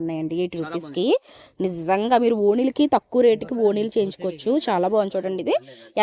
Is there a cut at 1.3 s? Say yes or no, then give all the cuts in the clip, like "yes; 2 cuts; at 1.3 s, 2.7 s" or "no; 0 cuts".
no; 0 cuts